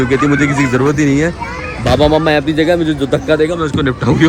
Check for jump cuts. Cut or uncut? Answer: uncut